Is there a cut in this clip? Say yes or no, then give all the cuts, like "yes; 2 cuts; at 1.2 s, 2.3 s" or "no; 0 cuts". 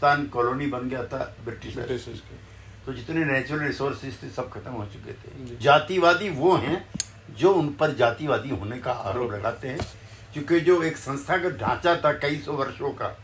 yes; 1 cut; at 5.6 s